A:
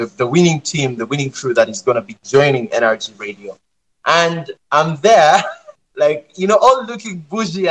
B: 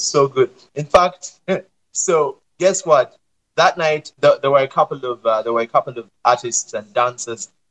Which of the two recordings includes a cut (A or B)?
B